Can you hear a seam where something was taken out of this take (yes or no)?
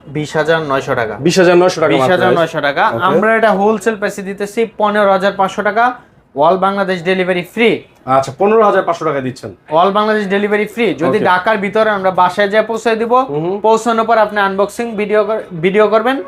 no